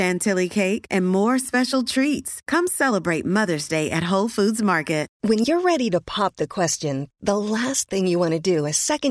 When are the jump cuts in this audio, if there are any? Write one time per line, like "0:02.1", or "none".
0:05.1